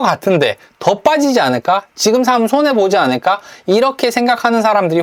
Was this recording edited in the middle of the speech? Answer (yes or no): no